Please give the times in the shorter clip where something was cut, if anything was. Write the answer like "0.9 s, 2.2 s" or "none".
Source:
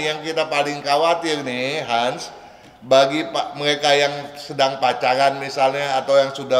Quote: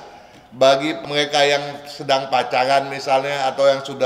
1.0 s